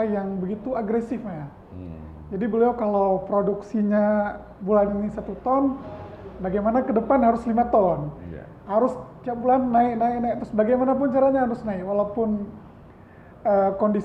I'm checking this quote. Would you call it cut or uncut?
uncut